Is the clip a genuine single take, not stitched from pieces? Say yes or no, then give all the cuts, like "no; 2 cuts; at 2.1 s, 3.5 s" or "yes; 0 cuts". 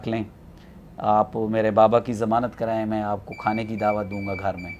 yes; 0 cuts